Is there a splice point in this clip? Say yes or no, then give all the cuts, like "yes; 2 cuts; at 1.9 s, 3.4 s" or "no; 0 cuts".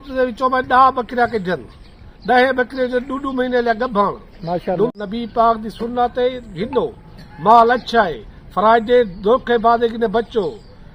yes; 1 cut; at 5.0 s